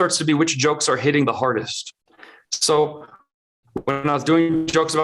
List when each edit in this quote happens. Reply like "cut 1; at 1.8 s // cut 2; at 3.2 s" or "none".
none

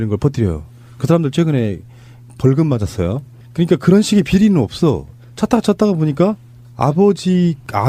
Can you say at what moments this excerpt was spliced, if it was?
none

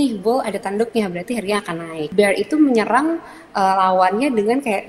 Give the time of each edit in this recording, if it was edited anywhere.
cut 1; at 2.0 s

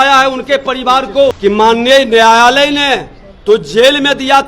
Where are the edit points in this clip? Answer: cut 1; at 1.4 s

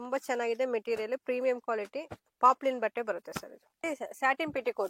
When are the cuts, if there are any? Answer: cut 1; at 3.8 s

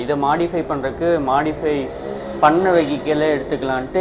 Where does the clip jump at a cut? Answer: none

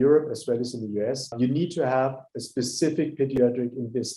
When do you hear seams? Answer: cut 1; at 1.3 s

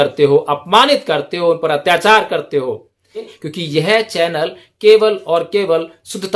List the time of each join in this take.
cut 1; at 3.4 s

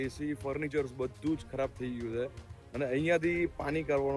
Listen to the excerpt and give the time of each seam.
none

